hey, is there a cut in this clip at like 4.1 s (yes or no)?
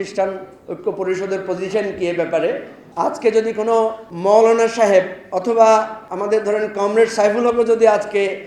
yes